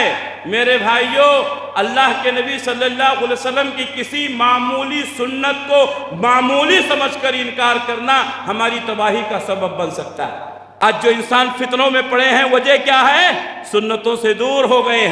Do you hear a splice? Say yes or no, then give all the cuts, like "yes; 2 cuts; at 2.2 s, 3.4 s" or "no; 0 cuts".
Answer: yes; 1 cut; at 10.7 s